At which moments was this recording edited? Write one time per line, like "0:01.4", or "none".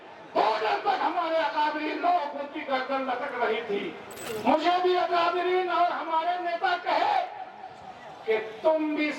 0:04.1